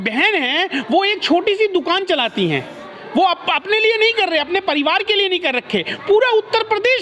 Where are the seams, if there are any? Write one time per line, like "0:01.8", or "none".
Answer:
none